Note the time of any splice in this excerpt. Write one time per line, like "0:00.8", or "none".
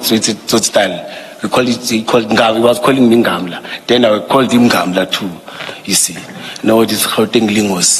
none